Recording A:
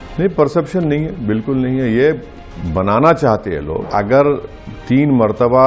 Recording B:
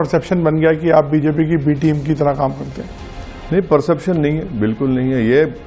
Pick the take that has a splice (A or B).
A